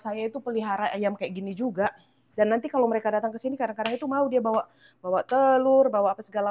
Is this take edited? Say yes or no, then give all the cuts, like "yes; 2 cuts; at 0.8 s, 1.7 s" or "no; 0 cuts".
no; 0 cuts